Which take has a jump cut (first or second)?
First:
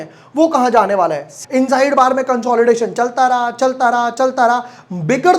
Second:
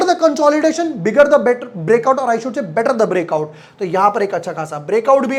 first